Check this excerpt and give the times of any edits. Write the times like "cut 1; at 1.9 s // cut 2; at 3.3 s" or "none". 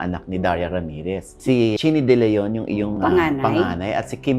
cut 1; at 1.8 s